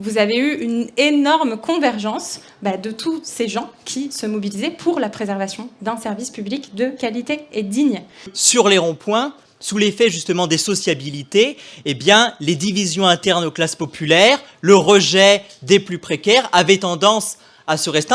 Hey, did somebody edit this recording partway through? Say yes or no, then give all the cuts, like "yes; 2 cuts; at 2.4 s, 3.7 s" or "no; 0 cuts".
yes; 1 cut; at 8.4 s